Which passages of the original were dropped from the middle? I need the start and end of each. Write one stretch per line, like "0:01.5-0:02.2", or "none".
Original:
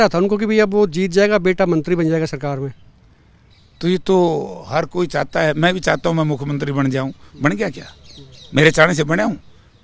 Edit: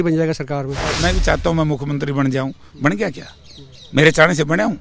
0:02.9-0:05.5